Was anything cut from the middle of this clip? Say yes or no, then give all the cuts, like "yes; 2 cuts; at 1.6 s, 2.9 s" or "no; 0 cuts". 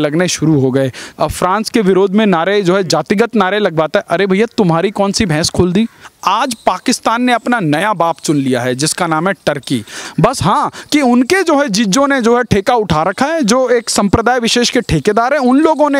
yes; 3 cuts; at 1.1 s, 6.0 s, 10.0 s